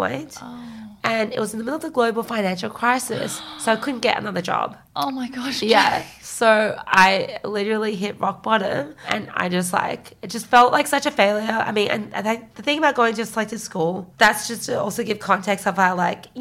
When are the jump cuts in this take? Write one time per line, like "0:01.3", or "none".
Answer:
none